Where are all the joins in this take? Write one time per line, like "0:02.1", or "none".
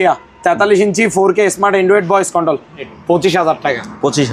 0:02.9